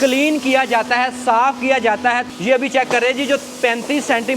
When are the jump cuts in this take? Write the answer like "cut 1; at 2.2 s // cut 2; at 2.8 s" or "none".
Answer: cut 1; at 2.2 s